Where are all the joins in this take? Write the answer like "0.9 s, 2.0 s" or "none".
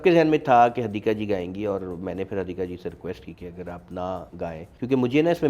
4.4 s